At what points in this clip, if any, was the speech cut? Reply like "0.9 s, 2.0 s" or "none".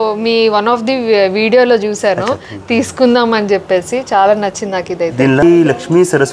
5.4 s

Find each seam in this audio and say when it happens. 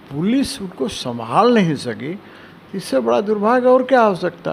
none

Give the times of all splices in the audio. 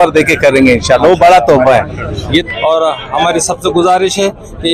2.4 s

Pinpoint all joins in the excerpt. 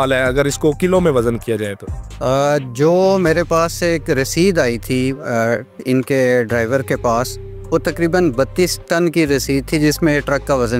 none

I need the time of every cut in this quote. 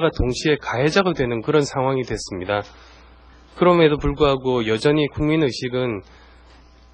4.5 s

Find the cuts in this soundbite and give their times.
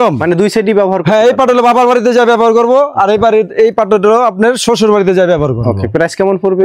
none

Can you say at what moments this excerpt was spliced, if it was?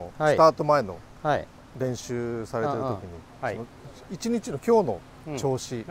none

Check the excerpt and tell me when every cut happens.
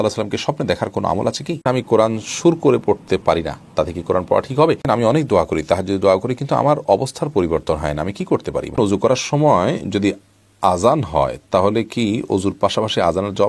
1.6 s, 4.8 s, 8.8 s

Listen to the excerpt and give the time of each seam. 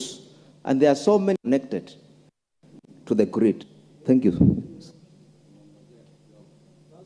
1.4 s

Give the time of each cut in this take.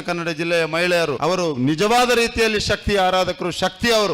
1.2 s

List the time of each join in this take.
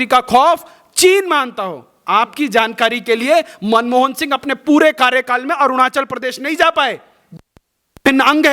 none

